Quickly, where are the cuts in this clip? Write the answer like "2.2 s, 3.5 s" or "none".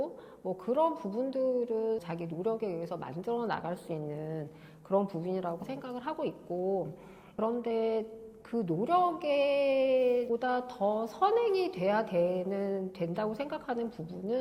none